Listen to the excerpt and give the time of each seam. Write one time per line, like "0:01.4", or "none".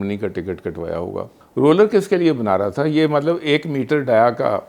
0:01.4